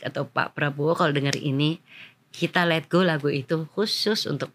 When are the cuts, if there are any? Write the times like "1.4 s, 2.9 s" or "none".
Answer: none